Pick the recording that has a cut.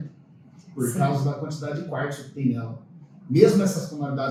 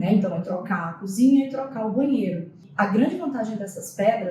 second; 1 cut; at 2.6 s

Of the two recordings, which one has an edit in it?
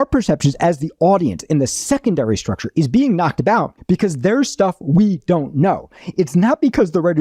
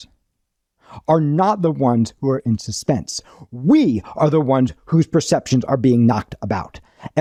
first; 1 cut; at 3.7 s

